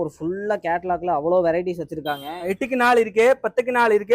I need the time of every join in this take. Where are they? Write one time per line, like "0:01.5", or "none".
0:02.4